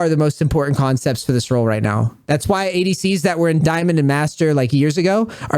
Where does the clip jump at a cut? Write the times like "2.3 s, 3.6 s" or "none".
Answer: 3.6 s